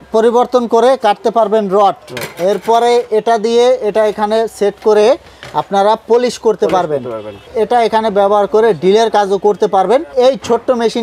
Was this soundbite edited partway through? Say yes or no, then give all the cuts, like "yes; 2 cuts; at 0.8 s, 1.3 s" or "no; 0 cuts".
yes; 2 cuts; at 7.4 s, 10.1 s